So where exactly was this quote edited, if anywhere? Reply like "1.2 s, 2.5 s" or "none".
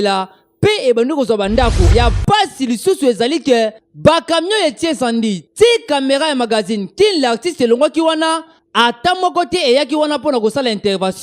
1.9 s